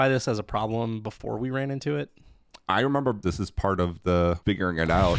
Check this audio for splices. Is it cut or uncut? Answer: cut